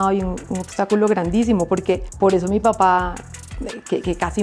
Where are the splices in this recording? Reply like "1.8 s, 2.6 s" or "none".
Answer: 2.1 s